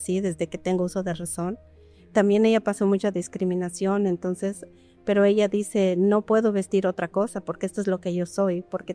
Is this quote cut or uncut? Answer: uncut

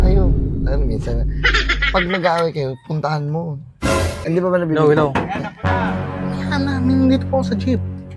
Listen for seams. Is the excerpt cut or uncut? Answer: cut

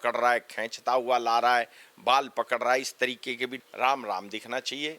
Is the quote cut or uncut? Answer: cut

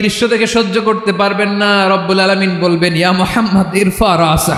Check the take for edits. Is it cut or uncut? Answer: uncut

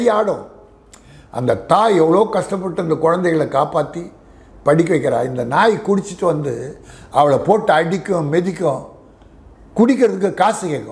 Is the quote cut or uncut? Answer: uncut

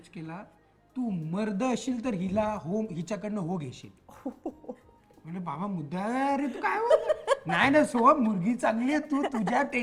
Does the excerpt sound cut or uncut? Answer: uncut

